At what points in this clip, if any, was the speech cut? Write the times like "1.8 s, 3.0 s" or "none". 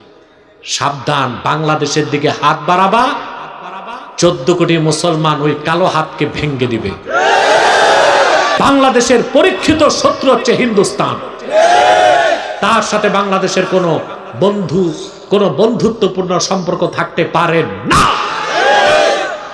8.6 s